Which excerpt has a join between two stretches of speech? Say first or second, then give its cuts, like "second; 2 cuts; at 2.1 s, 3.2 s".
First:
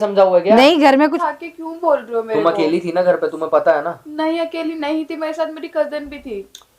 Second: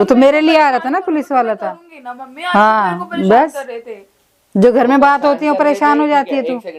first; 1 cut; at 1.0 s